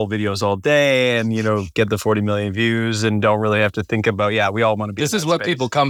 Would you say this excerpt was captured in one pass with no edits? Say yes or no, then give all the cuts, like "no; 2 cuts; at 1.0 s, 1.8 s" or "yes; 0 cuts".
yes; 0 cuts